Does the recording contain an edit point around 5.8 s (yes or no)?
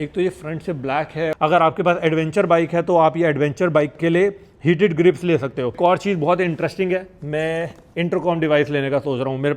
yes